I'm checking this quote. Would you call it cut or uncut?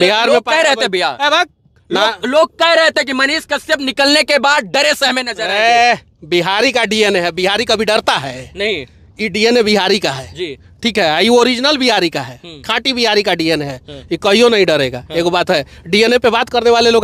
uncut